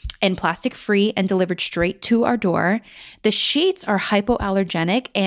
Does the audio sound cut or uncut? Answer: uncut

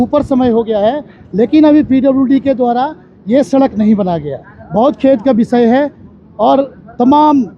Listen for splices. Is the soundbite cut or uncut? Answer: uncut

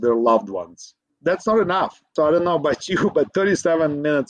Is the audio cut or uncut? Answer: cut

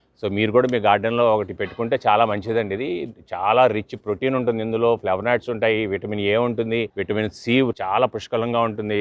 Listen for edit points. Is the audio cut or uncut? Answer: cut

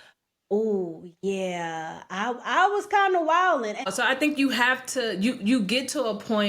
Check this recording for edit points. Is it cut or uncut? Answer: cut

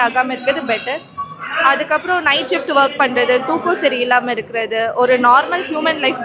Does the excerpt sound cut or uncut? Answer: uncut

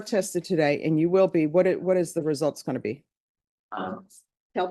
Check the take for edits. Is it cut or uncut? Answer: uncut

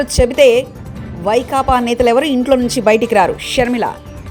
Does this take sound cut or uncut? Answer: uncut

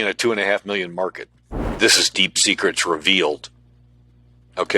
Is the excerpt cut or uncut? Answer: cut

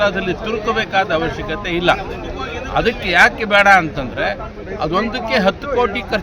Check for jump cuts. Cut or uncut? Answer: uncut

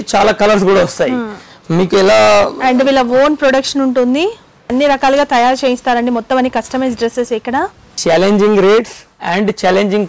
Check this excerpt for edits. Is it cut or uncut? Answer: cut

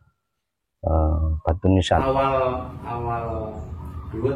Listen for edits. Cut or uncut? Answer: cut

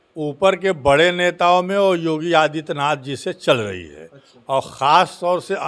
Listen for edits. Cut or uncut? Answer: uncut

